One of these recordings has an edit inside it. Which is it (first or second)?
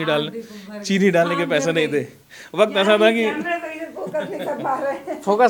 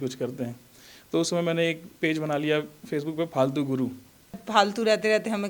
second